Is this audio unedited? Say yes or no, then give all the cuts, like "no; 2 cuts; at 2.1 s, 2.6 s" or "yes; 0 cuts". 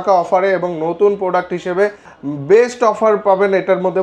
yes; 0 cuts